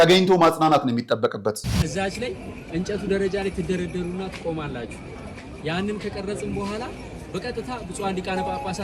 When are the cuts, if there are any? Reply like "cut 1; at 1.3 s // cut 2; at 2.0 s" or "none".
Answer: cut 1; at 1.7 s